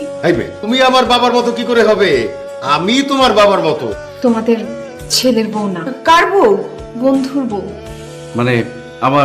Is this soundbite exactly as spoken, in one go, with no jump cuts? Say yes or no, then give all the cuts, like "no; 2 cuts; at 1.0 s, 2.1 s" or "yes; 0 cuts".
no; 1 cut; at 3.8 s